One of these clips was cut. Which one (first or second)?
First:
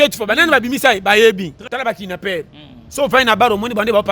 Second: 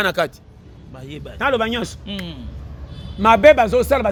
first